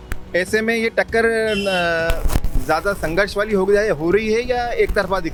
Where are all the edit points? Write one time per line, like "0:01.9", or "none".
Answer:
none